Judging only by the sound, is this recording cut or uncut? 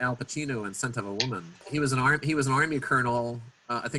cut